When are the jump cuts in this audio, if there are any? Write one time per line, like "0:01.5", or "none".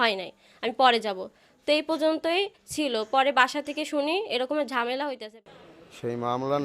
0:05.2